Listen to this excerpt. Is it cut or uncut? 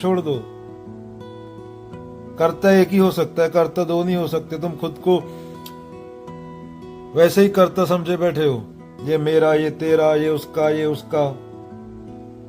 cut